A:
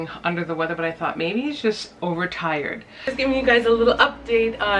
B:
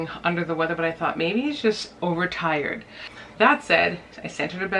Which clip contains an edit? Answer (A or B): A